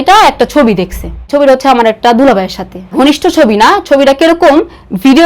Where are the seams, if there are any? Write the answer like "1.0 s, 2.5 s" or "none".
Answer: 1.1 s